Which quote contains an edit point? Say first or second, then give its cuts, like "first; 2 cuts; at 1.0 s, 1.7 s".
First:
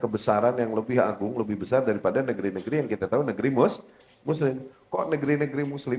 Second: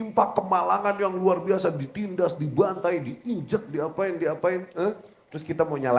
first; 1 cut; at 4.7 s